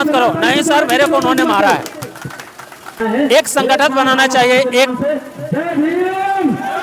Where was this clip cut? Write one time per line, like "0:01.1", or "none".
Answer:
0:03.0